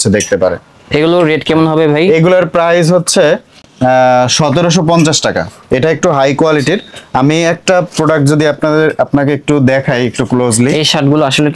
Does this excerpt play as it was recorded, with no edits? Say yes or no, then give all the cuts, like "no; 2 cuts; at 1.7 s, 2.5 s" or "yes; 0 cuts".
yes; 0 cuts